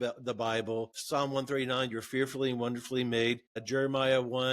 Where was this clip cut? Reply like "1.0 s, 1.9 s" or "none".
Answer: 1.0 s, 3.6 s